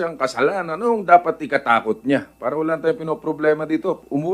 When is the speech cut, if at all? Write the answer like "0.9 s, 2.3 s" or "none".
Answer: none